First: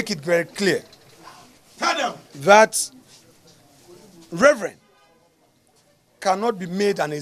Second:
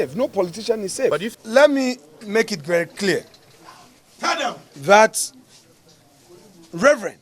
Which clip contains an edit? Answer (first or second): second